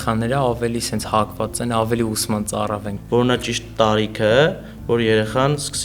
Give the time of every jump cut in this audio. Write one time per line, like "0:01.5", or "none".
0:02.9